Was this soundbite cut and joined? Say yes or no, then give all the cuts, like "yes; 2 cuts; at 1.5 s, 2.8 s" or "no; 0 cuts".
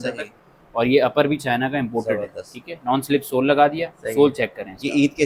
no; 0 cuts